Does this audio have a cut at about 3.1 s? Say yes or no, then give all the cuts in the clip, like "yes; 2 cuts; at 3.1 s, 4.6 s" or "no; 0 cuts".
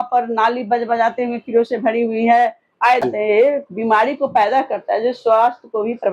yes; 1 cut; at 3.1 s